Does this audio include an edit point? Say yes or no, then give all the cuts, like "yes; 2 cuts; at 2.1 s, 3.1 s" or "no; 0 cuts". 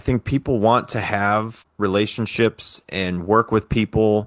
yes; 1 cut; at 1.6 s